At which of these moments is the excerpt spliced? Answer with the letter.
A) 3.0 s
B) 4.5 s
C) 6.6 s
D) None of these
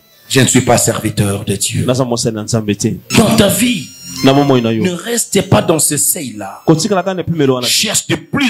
A